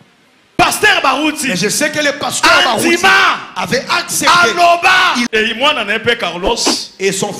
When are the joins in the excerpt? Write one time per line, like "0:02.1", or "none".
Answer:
0:05.3